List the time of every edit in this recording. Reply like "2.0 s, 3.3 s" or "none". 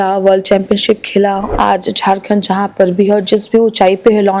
1.4 s